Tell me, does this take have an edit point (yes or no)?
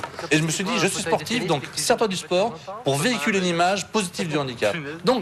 no